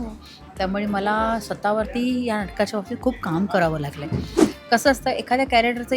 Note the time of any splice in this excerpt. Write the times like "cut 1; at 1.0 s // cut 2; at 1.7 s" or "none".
cut 1; at 4.4 s